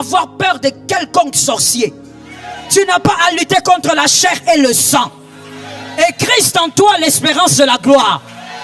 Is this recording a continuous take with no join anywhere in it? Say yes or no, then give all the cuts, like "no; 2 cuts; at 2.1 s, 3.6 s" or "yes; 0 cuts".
yes; 0 cuts